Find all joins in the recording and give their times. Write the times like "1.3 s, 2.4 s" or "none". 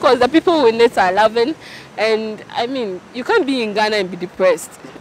none